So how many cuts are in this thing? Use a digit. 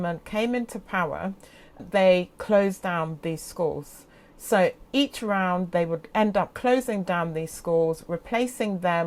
0